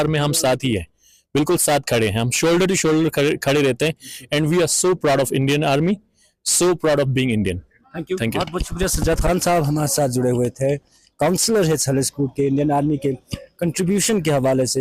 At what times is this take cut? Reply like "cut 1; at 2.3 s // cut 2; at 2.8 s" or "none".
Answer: none